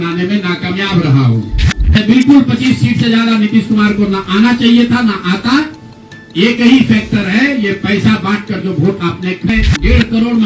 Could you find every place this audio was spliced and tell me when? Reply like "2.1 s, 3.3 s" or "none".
2.0 s, 9.5 s